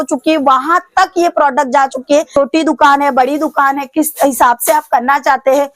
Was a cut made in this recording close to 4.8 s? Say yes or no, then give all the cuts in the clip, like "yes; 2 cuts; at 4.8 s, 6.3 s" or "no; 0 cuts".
no; 1 cut; at 2.3 s